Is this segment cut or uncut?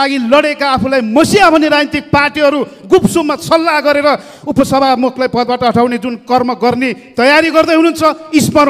uncut